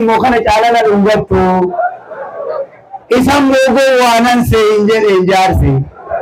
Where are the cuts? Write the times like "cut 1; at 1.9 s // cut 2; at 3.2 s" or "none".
none

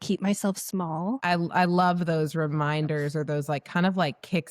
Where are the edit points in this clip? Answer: cut 1; at 1.2 s

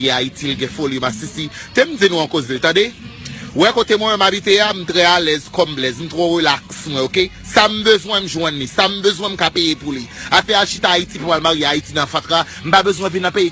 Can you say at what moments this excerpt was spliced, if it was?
cut 1; at 2.6 s

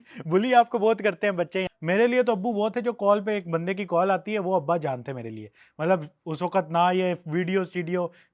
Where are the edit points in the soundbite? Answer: cut 1; at 1.7 s

